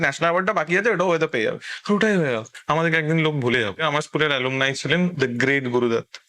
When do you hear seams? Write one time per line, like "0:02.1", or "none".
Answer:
0:02.5
0:03.8
0:05.2